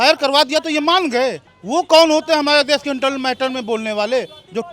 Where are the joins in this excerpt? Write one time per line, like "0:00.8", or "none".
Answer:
0:01.5